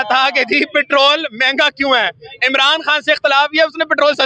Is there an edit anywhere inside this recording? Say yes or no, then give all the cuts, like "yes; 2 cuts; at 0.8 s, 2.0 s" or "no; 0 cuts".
no; 0 cuts